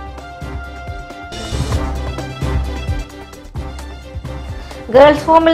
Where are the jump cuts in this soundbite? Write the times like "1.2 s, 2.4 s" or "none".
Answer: 4.4 s